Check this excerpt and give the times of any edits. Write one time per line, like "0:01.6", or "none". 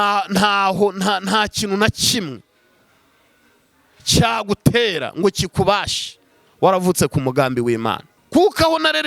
0:08.1